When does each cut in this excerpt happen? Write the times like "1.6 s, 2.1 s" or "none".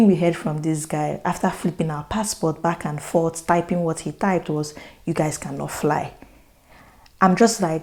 none